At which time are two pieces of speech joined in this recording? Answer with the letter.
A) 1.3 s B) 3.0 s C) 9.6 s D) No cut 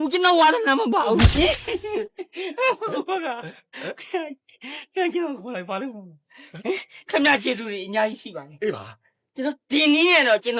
A